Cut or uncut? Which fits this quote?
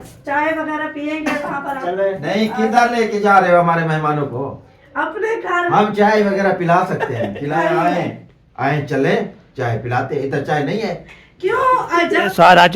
cut